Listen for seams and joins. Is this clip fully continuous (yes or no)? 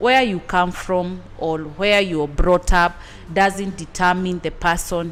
yes